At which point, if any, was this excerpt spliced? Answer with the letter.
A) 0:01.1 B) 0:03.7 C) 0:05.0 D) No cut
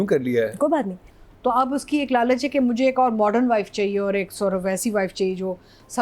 A